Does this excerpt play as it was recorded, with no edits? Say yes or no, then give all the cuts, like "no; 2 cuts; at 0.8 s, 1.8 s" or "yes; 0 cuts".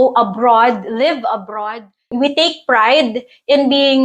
no; 1 cut; at 2.1 s